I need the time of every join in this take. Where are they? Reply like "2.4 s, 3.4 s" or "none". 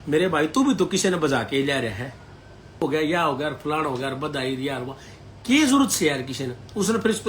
2.8 s